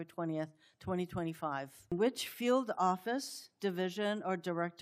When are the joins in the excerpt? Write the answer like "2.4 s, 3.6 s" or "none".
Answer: 1.9 s